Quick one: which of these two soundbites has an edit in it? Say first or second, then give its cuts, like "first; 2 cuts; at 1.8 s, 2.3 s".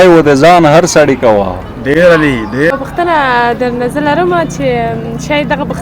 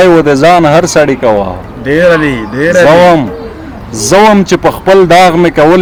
first; 1 cut; at 2.7 s